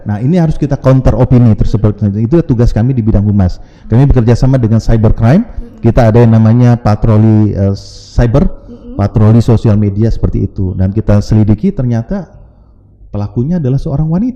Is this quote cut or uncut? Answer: uncut